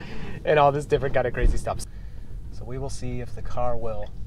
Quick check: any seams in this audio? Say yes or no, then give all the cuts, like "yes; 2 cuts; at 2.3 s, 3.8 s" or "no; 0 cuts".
yes; 1 cut; at 1.8 s